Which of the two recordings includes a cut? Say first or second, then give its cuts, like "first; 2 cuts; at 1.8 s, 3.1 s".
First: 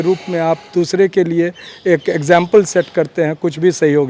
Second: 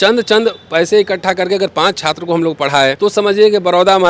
second; 1 cut; at 3.0 s